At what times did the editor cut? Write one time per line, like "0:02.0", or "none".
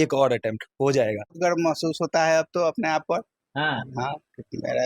0:01.3